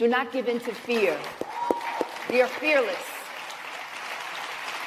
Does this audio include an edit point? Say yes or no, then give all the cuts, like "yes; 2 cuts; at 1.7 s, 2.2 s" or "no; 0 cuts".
no; 0 cuts